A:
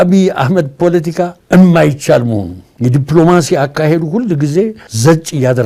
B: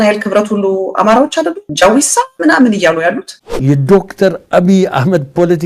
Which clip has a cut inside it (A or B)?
B